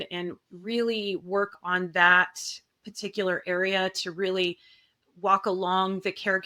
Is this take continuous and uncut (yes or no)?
yes